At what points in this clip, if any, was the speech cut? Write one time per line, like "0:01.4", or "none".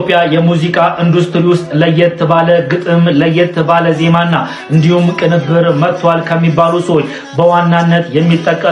none